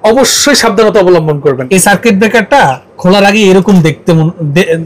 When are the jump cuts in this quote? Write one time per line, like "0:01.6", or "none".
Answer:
0:01.6